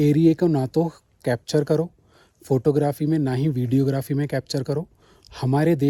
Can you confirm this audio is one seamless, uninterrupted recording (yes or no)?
yes